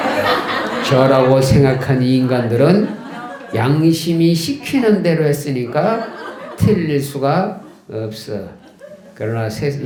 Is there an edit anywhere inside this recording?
no; 0 cuts

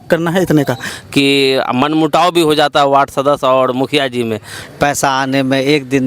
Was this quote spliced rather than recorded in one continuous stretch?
yes; 2 cuts; at 0.9 s, 4.6 s

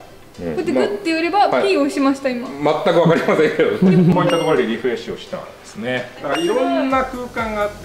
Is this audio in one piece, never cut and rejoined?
no; 2 cuts; at 4.1 s, 6.2 s

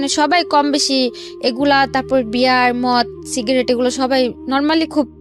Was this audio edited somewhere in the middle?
no; 0 cuts

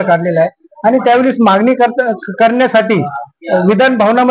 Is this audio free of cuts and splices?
yes; 0 cuts

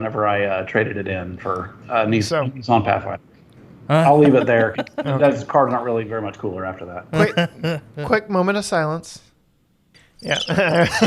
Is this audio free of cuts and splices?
no; 3 cuts; at 1.7 s, 3.6 s, 9.8 s

